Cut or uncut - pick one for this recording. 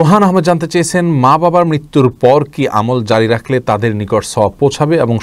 uncut